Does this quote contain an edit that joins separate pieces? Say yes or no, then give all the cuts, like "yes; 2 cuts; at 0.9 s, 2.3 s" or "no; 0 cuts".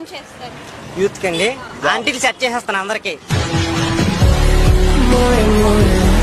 no; 0 cuts